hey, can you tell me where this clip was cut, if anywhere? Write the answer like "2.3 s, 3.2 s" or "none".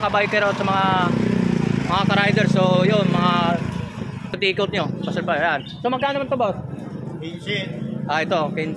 4.3 s